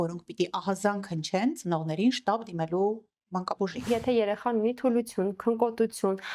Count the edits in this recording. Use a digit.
1